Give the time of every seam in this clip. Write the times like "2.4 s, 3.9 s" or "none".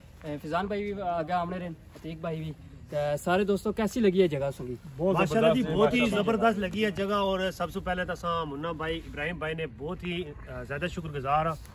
none